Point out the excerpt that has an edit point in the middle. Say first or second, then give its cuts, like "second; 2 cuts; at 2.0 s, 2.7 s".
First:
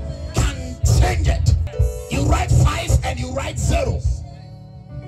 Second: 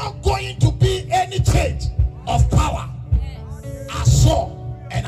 first; 1 cut; at 1.7 s